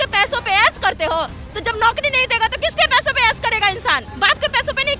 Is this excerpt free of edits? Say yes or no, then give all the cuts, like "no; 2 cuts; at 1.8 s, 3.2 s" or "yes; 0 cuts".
yes; 0 cuts